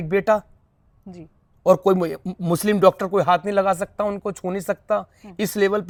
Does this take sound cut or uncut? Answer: uncut